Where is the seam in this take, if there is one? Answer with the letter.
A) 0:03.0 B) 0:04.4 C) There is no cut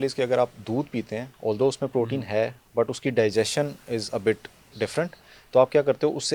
C